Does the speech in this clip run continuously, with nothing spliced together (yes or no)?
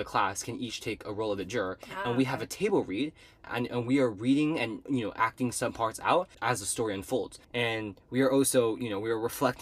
no